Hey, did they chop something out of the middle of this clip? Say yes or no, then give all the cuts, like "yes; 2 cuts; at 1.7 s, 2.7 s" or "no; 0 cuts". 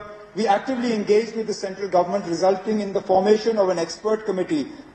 no; 0 cuts